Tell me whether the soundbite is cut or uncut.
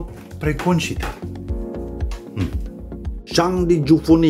cut